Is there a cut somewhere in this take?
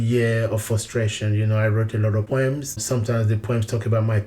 yes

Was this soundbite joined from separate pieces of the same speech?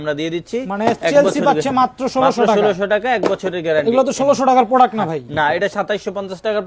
no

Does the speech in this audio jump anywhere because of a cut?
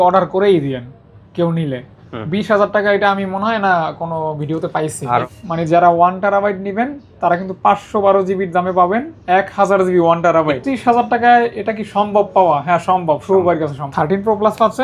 yes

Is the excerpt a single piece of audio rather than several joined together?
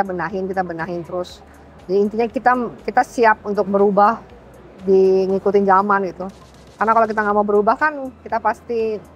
yes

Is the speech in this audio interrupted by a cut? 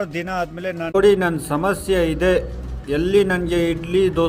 yes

